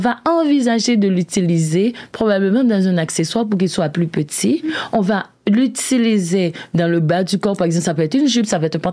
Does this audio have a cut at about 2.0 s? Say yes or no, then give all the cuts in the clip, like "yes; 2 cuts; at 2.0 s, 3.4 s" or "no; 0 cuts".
no; 0 cuts